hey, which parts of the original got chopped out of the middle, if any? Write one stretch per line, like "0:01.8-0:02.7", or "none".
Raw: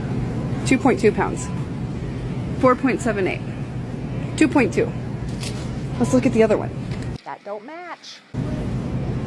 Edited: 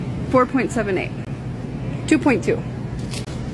none